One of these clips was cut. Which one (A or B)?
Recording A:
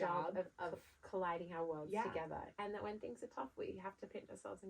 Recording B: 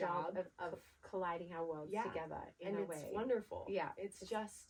A